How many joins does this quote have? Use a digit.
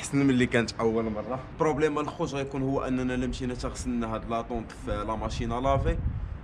1